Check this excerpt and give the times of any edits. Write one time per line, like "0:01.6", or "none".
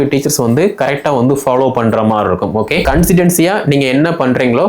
0:02.8